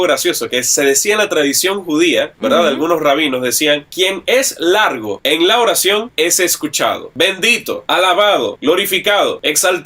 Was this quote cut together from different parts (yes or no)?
yes